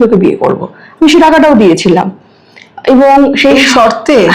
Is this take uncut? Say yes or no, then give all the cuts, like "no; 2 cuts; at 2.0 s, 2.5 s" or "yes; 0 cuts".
yes; 0 cuts